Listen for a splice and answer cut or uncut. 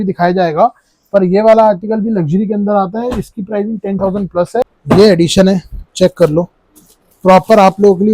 cut